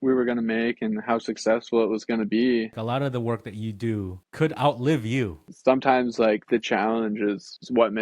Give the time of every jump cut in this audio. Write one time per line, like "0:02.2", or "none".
0:02.7
0:05.5